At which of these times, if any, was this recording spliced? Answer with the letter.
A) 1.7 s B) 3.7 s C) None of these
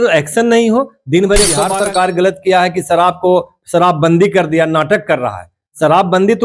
A